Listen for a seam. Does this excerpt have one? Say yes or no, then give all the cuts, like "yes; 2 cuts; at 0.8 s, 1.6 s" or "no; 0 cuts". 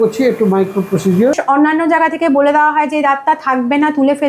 yes; 1 cut; at 1.4 s